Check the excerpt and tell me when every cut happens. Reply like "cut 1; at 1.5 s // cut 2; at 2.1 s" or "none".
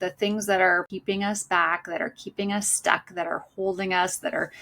cut 1; at 0.9 s